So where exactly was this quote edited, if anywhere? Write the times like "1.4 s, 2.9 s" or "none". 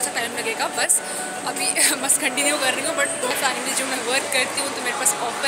3.3 s